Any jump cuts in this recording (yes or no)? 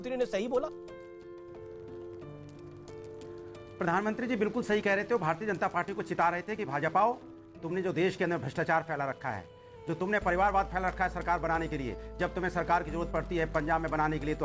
no